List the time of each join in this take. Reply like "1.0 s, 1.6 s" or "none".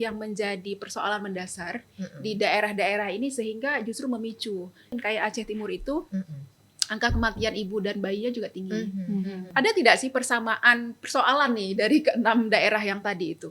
4.9 s, 9.5 s